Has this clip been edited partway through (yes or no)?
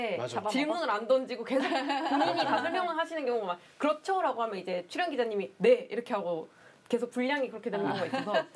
no